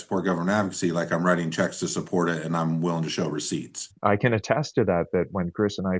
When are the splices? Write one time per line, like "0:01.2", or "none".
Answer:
0:03.9

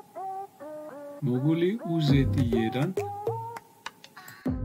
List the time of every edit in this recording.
none

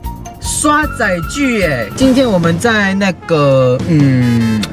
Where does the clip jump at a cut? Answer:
0:01.8

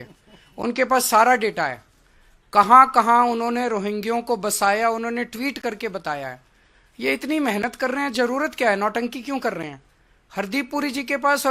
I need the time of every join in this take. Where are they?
none

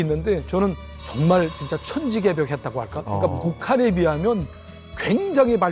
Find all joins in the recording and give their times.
none

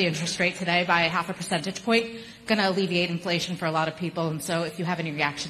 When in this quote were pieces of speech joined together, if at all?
none

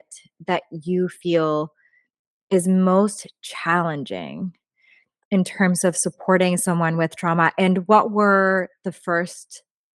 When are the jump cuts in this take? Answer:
none

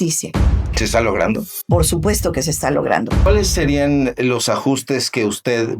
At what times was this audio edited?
0:01.5
0:03.3

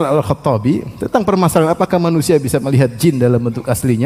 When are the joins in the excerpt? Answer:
none

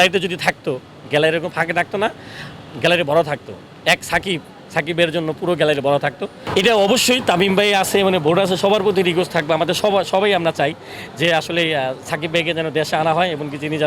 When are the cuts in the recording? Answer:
0:06.4

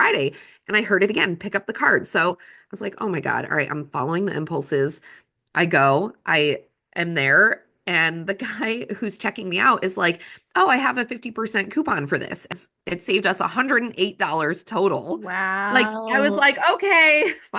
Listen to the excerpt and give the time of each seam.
0:12.5

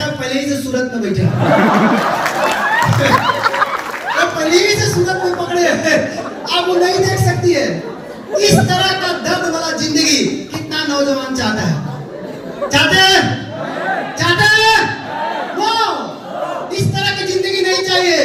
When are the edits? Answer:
none

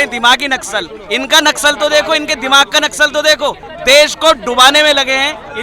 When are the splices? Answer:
0:03.6

